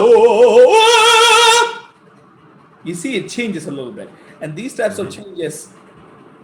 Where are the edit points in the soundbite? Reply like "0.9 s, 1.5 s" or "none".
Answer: none